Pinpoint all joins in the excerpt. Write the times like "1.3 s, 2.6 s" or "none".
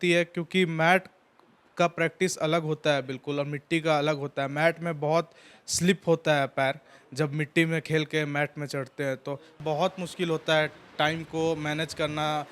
9.6 s